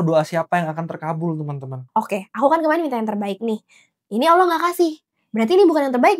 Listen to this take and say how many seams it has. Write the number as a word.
one